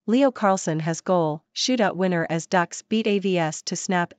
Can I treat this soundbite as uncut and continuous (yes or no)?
yes